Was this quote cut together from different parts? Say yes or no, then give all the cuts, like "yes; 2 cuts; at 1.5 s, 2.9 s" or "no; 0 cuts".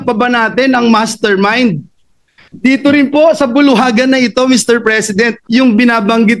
yes; 1 cut; at 5.4 s